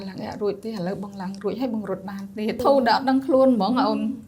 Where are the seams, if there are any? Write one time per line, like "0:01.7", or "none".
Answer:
0:02.6